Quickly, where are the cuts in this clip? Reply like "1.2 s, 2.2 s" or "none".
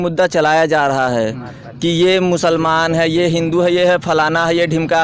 none